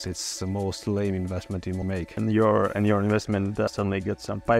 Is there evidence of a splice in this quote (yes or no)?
yes